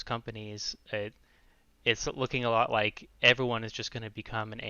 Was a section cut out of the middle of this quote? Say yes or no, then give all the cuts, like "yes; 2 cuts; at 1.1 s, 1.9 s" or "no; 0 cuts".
no; 0 cuts